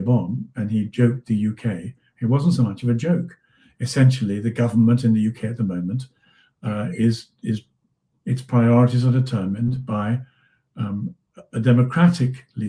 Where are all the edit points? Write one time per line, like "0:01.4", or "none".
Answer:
none